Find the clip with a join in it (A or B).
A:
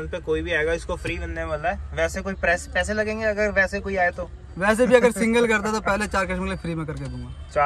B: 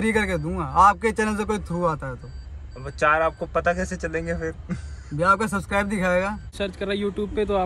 B